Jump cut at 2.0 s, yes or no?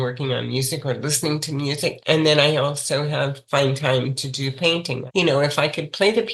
yes